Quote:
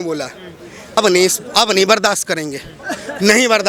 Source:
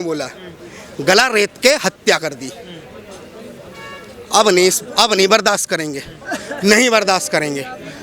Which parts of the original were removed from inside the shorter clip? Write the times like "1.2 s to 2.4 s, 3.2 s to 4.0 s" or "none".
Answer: 1.0 s to 4.4 s